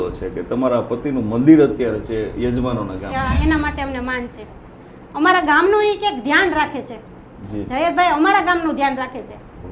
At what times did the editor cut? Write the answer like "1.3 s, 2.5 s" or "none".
3.1 s